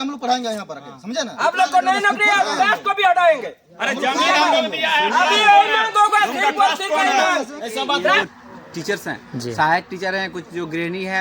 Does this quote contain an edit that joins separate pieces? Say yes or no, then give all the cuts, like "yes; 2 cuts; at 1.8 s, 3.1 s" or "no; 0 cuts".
yes; 1 cut; at 8.2 s